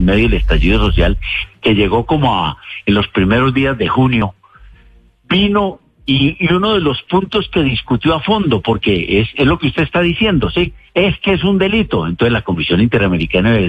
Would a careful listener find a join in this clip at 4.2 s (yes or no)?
yes